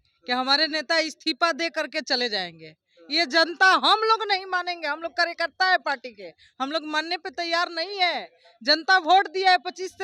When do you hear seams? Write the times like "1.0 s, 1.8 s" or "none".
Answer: none